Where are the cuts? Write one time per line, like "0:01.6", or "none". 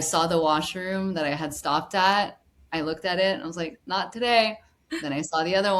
none